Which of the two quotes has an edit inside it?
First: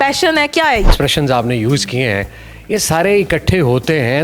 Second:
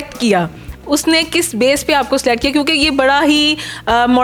first; 1 cut; at 0.9 s

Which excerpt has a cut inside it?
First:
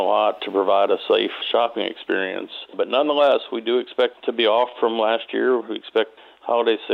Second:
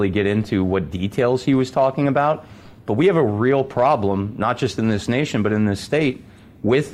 first; 4 cuts; at 1.4 s, 2.7 s, 4.2 s, 6.1 s

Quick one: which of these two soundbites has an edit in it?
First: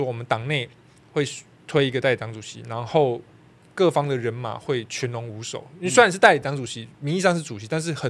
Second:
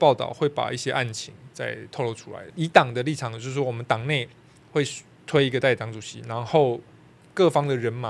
second; 1 cut; at 2.4 s

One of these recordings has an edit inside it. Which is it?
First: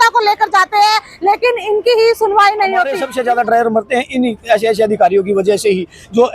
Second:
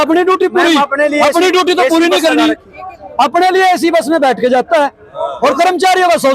first; 1 cut; at 3.0 s

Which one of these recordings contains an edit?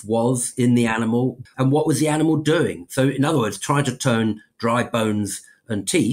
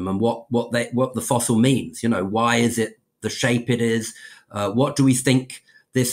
first; 1 cut; at 1.4 s

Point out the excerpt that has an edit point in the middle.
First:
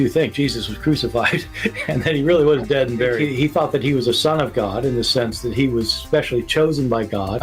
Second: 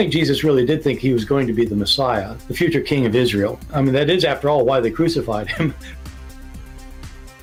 first; 1 cut; at 1.8 s

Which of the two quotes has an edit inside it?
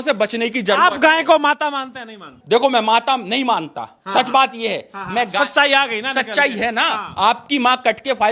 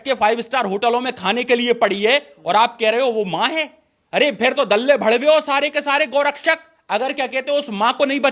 first; 2 cuts; at 2.4 s, 7.0 s

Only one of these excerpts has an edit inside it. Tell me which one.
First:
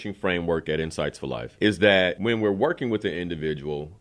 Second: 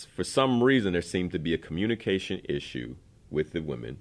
first; 2 cuts; at 1.4 s, 2.2 s

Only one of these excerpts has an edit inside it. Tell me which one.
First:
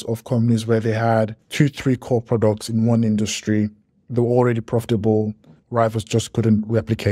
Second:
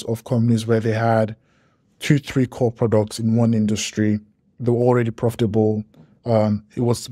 first; 2 cuts; at 1.4 s, 5.5 s

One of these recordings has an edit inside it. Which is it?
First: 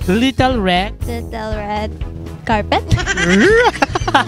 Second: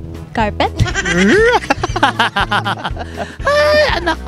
first; 1 cut; at 0.9 s

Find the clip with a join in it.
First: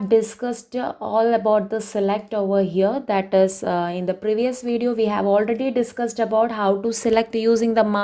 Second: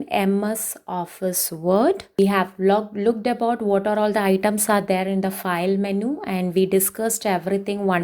second; 1 cut; at 2.1 s

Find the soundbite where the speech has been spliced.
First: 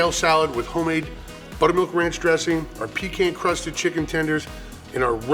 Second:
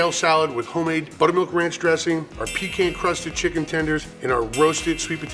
second; 2 cuts; at 1.1 s, 4.1 s

